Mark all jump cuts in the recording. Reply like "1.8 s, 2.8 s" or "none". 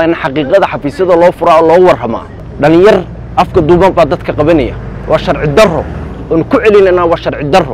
2.3 s

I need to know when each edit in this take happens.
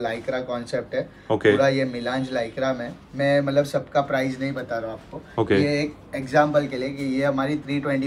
none

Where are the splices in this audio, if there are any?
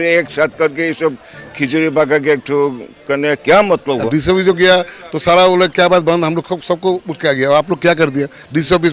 4.0 s

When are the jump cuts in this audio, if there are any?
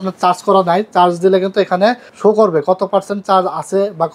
2.1 s

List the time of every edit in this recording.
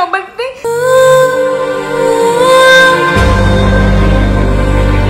none

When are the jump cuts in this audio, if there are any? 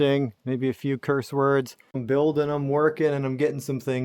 2.0 s

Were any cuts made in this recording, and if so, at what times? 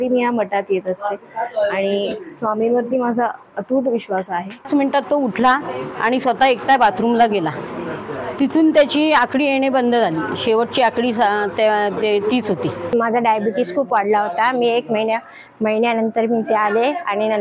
4.7 s, 12.8 s

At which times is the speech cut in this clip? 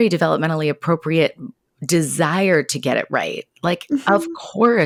none

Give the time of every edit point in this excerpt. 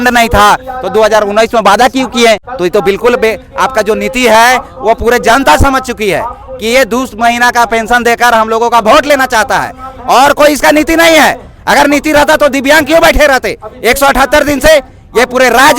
2.5 s

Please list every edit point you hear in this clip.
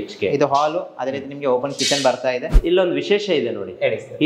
2.6 s

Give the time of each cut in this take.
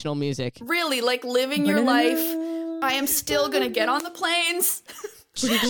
2.8 s

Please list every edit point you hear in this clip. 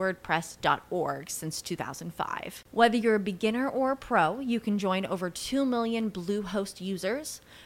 none

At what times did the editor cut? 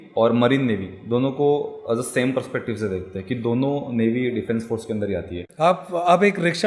5.3 s

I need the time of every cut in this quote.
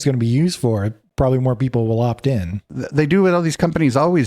2.7 s

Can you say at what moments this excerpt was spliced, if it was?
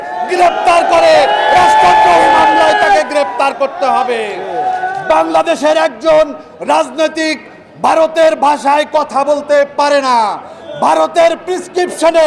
none

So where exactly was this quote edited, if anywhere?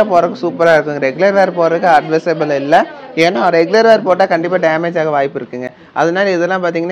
none

